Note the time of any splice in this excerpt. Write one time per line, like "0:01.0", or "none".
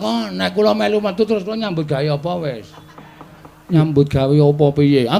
0:03.6